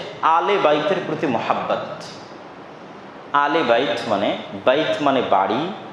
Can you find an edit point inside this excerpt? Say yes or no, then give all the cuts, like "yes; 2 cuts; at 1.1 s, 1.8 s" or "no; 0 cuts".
no; 0 cuts